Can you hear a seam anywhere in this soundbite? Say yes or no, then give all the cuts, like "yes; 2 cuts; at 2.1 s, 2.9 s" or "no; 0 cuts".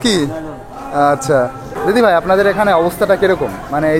yes; 1 cut; at 1.7 s